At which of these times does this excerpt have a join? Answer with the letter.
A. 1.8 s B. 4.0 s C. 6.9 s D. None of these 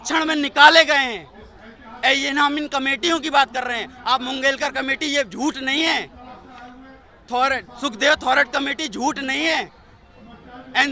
D